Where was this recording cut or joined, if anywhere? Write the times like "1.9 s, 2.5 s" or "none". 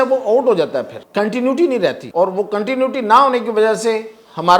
1.0 s, 2.0 s